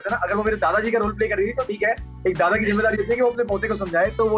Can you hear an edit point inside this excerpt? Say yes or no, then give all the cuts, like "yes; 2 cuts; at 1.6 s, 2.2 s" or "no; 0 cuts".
no; 0 cuts